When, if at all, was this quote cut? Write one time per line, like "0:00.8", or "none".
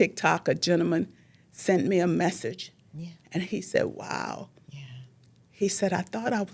none